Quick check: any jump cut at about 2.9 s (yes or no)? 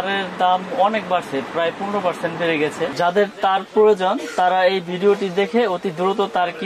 yes